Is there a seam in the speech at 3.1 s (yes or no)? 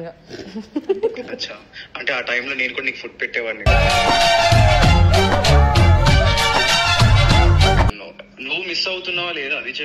no